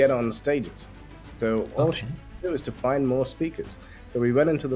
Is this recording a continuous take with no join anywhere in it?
yes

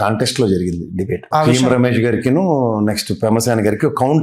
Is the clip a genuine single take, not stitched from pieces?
no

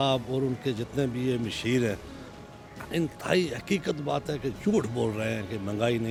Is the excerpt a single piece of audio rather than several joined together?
yes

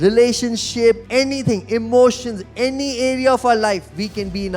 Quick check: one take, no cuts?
no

